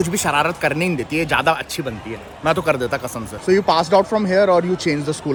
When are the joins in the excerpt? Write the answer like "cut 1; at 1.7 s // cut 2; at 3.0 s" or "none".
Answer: none